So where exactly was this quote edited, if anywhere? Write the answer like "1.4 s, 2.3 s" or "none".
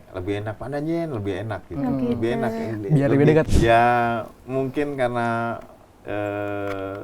3.5 s